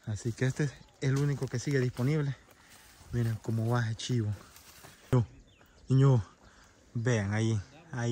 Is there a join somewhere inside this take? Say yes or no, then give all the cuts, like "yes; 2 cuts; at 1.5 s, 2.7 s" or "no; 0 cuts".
yes; 1 cut; at 5.1 s